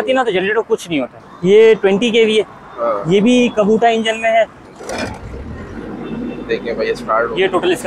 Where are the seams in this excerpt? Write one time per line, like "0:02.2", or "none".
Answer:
0:01.2
0:04.7